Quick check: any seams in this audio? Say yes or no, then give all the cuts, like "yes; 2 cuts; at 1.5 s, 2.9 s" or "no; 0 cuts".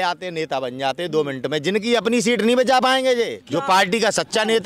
yes; 1 cut; at 3.4 s